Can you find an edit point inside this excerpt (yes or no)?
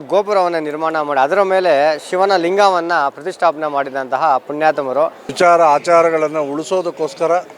yes